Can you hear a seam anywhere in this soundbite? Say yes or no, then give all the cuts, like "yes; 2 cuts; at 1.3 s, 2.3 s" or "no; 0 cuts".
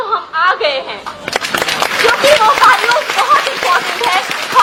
no; 0 cuts